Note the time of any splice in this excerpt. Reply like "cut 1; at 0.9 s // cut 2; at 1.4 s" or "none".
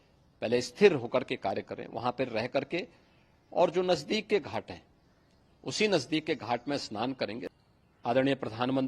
cut 1; at 7.5 s

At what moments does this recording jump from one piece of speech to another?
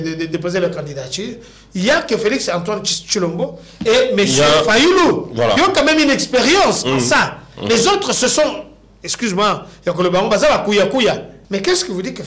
cut 1; at 11.3 s

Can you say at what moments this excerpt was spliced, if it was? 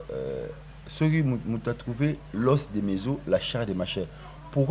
none

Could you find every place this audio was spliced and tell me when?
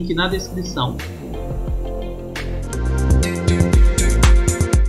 cut 1; at 2.6 s // cut 2; at 4.2 s

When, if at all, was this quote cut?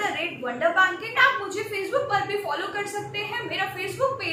cut 1; at 1.1 s

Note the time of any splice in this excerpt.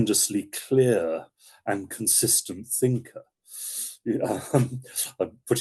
none

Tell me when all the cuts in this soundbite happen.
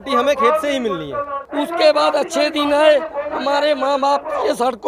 cut 1; at 1.4 s

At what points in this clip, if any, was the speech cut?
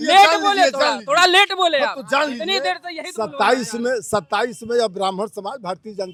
none

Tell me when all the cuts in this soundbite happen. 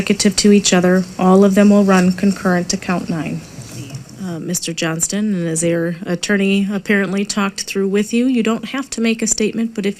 none

